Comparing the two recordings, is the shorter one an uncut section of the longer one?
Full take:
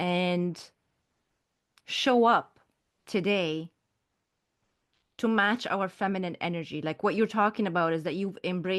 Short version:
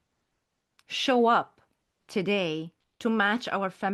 no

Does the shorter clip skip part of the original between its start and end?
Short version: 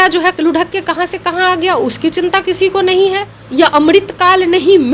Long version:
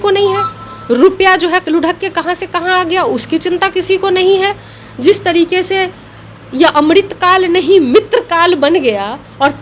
yes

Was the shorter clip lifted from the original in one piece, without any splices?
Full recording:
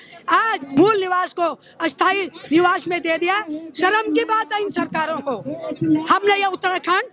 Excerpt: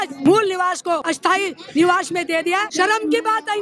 no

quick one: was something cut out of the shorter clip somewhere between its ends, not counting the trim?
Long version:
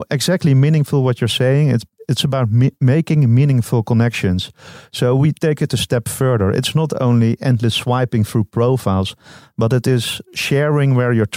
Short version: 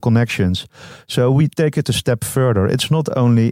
no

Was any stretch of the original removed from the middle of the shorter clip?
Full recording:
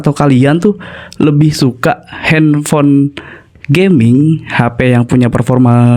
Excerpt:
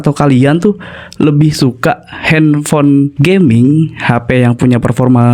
yes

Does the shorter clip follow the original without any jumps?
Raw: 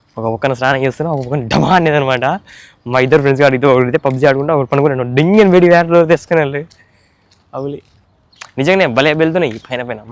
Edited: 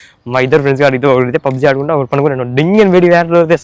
yes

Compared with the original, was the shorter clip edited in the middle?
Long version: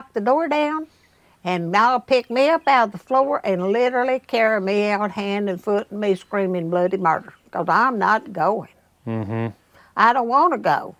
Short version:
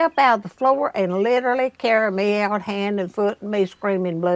no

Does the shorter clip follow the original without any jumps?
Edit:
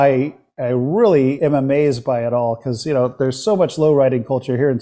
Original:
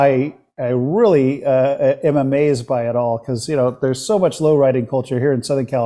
no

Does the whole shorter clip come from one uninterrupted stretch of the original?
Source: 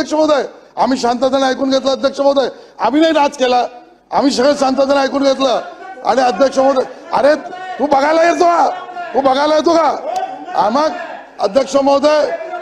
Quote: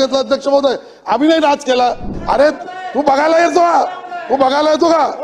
no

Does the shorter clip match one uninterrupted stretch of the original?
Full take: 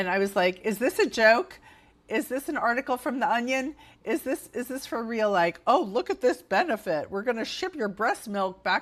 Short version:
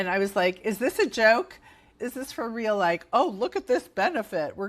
no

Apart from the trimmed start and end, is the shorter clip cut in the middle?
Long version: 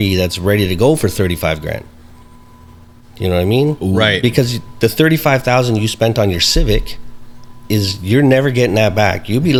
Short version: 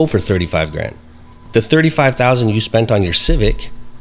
yes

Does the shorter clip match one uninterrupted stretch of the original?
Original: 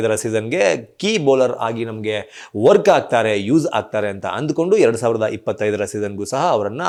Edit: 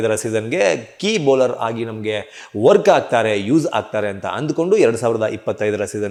yes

